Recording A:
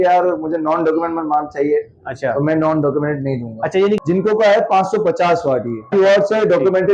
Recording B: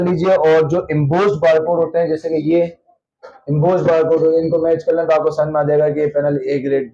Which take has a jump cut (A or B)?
A